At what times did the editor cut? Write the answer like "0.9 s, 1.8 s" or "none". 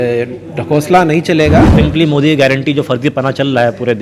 1.7 s